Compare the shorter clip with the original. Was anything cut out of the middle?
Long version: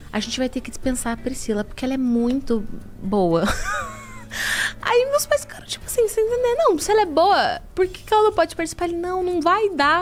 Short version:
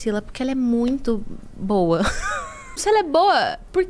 yes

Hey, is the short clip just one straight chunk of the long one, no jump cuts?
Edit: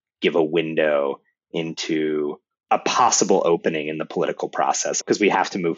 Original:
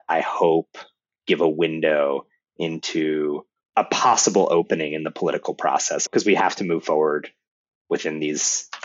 yes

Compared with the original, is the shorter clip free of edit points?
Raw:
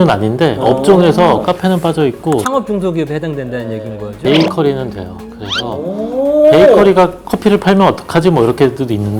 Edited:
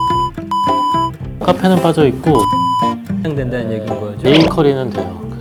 yes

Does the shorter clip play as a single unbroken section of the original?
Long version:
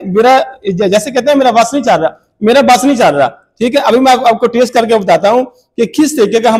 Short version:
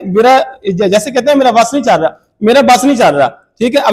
yes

